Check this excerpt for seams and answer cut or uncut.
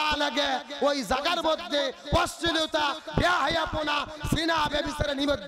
uncut